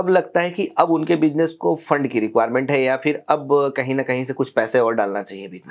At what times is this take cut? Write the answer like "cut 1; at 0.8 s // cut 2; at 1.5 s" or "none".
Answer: none